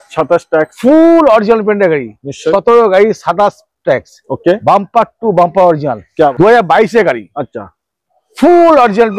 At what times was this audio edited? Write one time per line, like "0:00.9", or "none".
0:06.3